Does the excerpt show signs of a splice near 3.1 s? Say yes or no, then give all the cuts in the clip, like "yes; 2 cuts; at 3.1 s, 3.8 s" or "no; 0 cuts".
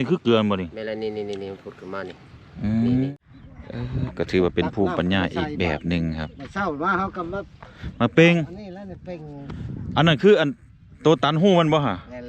yes; 1 cut; at 3.1 s